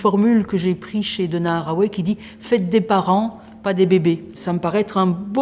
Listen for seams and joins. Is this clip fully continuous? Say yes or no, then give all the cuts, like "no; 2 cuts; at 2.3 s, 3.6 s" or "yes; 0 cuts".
yes; 0 cuts